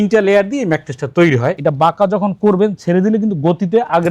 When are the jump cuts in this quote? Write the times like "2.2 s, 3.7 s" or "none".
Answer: 1.6 s